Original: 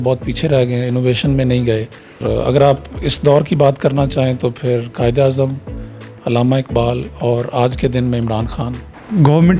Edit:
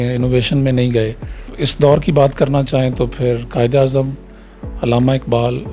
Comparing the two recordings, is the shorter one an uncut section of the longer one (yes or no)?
no